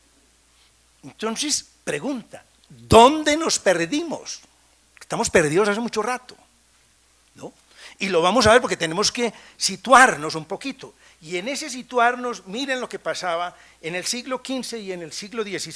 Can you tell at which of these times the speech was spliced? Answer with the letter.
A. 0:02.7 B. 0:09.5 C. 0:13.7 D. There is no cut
A